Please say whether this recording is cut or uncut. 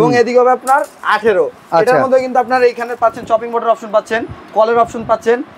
uncut